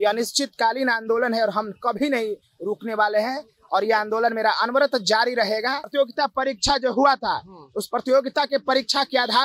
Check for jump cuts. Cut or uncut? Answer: cut